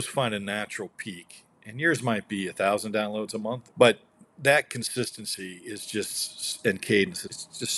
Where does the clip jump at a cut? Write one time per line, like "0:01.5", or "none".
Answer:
0:03.7